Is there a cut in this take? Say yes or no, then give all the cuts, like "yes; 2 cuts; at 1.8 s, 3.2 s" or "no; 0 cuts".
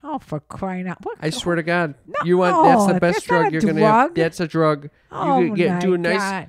no; 0 cuts